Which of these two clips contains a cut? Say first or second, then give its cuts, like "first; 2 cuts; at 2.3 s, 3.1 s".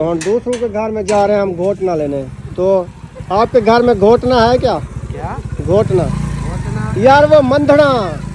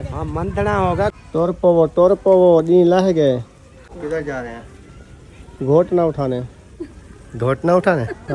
second; 2 cuts; at 1.2 s, 3.9 s